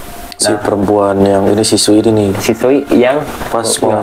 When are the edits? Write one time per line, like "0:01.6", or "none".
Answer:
none